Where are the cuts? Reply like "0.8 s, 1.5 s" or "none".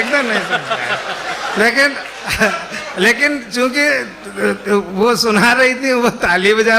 none